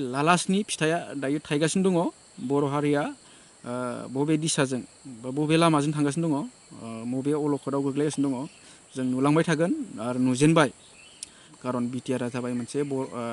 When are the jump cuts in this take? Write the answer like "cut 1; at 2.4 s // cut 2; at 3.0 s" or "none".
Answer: cut 1; at 11.5 s